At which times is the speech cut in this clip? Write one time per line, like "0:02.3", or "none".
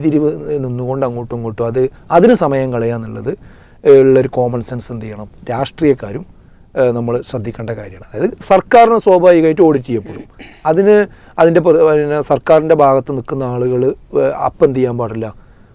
none